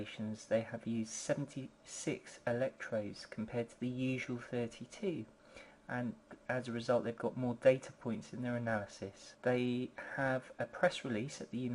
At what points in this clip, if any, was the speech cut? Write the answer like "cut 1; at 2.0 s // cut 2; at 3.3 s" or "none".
cut 1; at 8.7 s